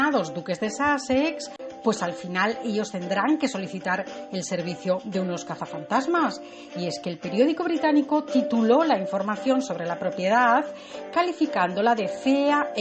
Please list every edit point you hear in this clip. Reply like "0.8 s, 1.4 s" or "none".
none